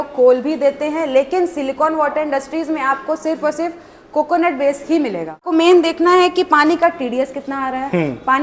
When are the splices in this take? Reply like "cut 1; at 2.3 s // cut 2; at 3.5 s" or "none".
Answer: cut 1; at 5.5 s